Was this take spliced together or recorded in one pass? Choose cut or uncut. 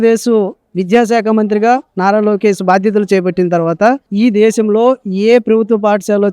cut